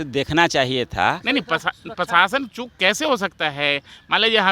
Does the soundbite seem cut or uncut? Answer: cut